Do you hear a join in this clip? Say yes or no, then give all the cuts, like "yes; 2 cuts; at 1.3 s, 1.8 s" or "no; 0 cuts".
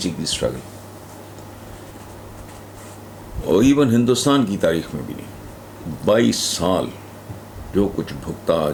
no; 0 cuts